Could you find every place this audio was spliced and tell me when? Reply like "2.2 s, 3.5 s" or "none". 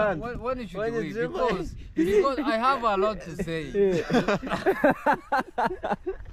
none